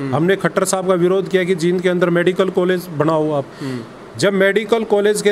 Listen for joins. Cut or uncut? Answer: uncut